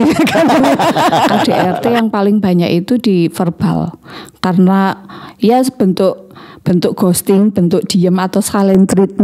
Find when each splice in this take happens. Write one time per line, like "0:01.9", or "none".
0:01.4